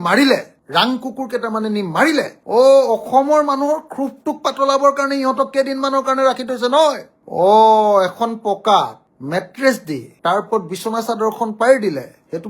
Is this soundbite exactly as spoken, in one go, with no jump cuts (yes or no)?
no